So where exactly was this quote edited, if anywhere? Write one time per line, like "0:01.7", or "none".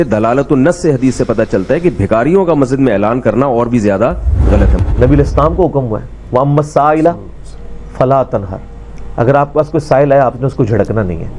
0:04.7